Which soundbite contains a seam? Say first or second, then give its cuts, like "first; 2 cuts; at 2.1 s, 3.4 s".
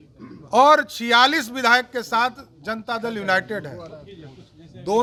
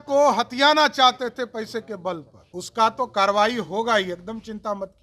second; 1 cut; at 2.4 s